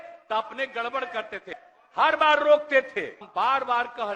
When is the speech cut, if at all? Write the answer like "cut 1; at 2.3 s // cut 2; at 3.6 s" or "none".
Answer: cut 1; at 1.6 s // cut 2; at 3.3 s